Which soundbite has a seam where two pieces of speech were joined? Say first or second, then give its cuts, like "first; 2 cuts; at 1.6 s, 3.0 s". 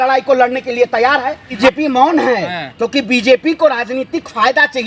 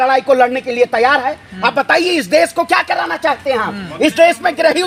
first; 1 cut; at 1.5 s